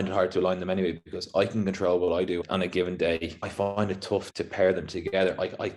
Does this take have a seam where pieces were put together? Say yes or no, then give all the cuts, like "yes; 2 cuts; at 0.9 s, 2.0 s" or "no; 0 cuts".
no; 0 cuts